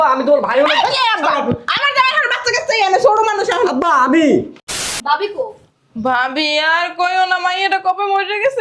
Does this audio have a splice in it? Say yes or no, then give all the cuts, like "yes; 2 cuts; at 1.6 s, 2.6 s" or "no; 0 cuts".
yes; 1 cut; at 4.7 s